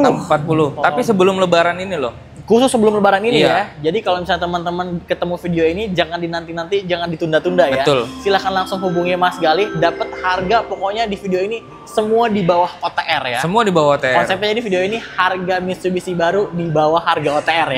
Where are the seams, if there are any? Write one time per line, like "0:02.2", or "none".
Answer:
none